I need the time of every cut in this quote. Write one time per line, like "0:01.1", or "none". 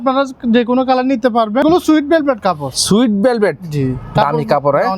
0:01.6